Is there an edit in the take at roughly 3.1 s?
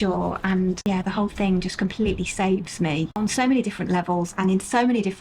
yes; 1 cut; at 3.1 s

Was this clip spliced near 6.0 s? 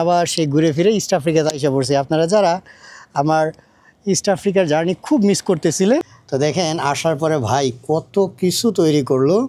yes; 1 cut; at 6.0 s

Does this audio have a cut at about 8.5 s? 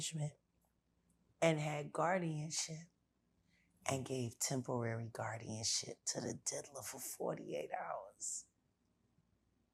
no; 0 cuts

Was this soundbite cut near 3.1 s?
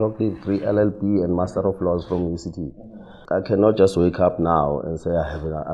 yes; 1 cut; at 3.1 s

